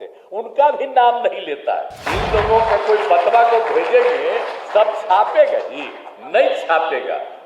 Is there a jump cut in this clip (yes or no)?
yes